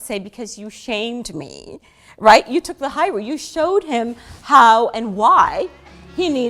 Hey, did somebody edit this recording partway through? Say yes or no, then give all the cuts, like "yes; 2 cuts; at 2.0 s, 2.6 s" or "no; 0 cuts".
no; 0 cuts